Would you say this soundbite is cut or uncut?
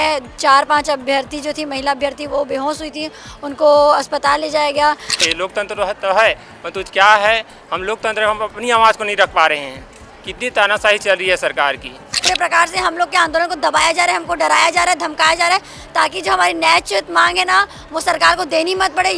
cut